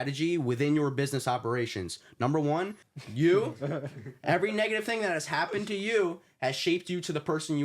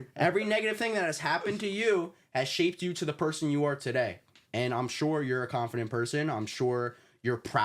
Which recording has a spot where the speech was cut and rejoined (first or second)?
first